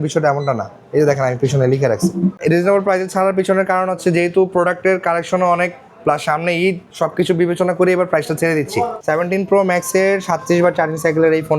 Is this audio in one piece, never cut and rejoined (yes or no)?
no